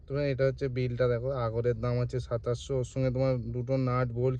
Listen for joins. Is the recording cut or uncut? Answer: uncut